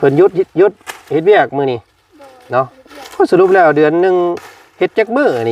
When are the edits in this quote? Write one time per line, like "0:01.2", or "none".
none